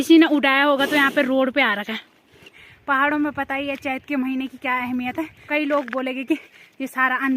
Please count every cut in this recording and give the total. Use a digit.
2